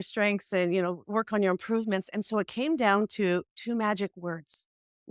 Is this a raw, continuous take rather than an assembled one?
yes; 0 cuts

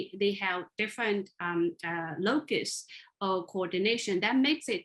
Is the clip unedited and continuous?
yes; 0 cuts

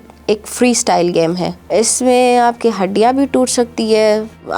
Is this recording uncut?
no; 1 cut; at 1.6 s

